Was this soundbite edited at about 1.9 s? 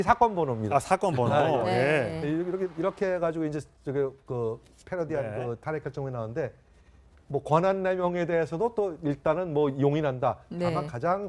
no; 1 cut; at 8.2 s

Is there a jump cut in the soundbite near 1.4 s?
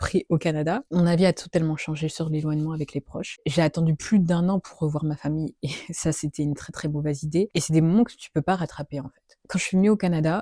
no; 3 cuts; at 3.3 s, 7.5 s, 9.4 s

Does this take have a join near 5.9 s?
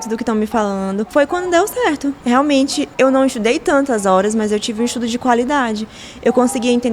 no; 3 cuts; at 1.1 s, 2.2 s, 2.9 s

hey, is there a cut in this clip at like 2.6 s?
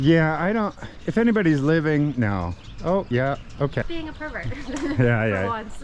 no; 1 cut; at 3.8 s

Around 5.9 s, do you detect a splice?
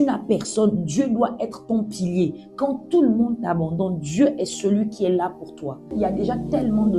yes; 1 cut; at 5.9 s

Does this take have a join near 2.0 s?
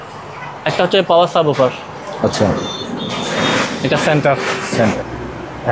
no; 1 cut; at 4.8 s

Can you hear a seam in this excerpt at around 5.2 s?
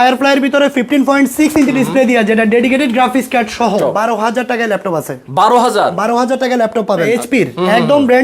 no; 2 cuts; at 3.8 s, 7.1 s

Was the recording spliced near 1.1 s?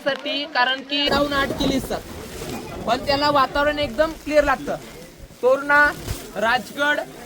yes; 1 cut; at 1.1 s

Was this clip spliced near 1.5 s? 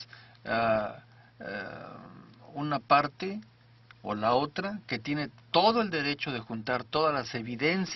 no; 1 cut; at 6.1 s

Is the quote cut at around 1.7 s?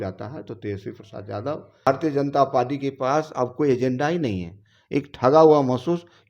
yes; 1 cut; at 1.7 s

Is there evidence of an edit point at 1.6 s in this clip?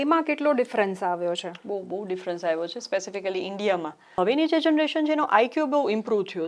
no; 1 cut; at 4.1 s

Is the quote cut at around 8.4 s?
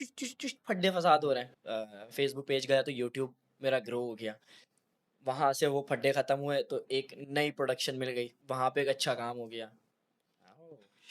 yes; 2 cuts; at 1.5 s, 8.4 s

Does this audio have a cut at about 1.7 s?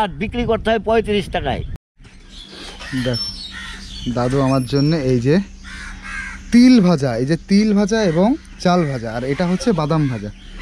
yes; 1 cut; at 1.7 s

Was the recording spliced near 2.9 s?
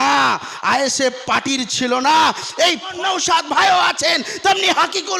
yes; 1 cut; at 2.9 s

